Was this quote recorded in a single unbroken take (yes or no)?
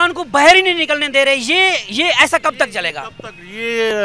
yes